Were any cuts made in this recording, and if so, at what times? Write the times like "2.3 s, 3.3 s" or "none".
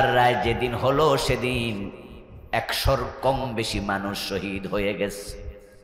none